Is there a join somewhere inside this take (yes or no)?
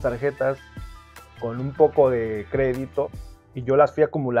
yes